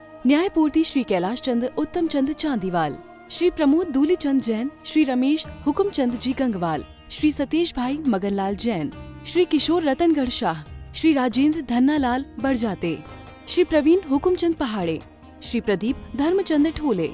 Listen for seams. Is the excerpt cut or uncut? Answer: uncut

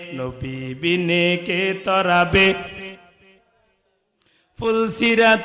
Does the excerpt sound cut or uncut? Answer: uncut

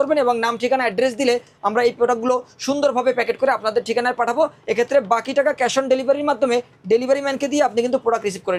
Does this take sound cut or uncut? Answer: uncut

